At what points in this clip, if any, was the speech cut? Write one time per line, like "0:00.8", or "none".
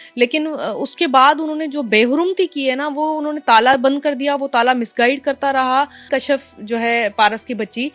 0:06.1